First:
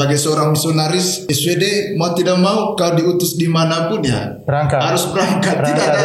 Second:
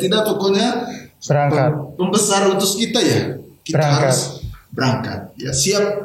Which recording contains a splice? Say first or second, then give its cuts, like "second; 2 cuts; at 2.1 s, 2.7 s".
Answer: first; 1 cut; at 1.2 s